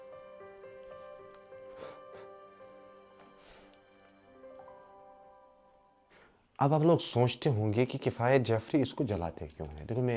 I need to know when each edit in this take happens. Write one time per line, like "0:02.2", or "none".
0:06.2